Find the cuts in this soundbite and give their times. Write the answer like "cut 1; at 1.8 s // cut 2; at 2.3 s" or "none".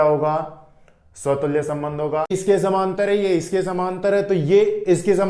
cut 1; at 2.4 s